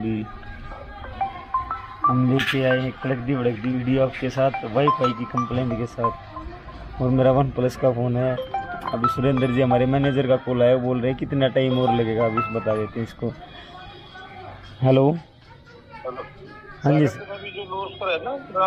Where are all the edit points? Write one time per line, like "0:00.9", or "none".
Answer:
none